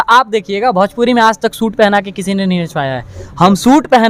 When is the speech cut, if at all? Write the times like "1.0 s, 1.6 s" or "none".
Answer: none